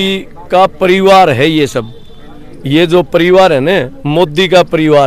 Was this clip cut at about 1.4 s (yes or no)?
no